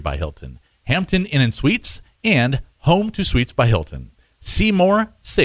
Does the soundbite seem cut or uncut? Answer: uncut